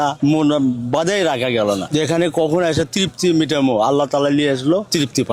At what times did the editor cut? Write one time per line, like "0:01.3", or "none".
none